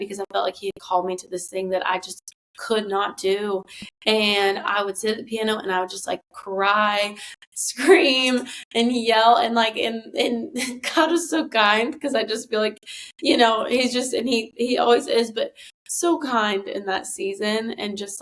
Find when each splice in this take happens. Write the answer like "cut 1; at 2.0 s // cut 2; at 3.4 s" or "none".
none